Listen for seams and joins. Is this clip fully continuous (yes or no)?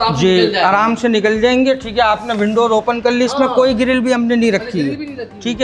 yes